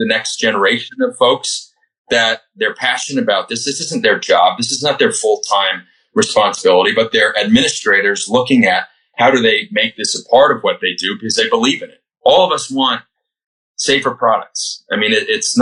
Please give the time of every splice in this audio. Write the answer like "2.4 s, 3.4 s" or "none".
none